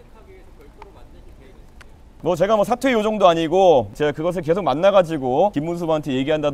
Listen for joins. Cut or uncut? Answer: cut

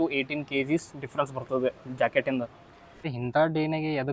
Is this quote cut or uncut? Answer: cut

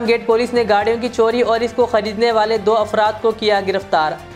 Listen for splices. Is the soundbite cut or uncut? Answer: uncut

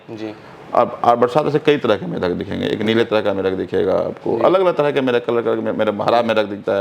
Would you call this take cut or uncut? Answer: uncut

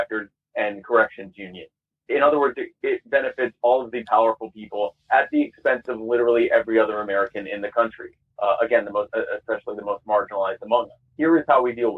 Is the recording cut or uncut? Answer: cut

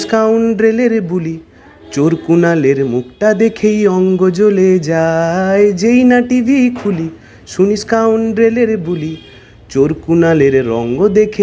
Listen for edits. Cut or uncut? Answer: uncut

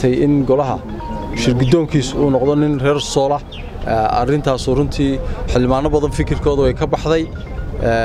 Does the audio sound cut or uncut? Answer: uncut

